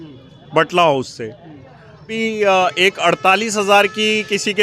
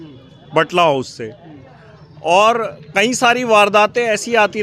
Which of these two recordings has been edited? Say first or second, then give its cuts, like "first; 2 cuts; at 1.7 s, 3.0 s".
first; 1 cut; at 2.1 s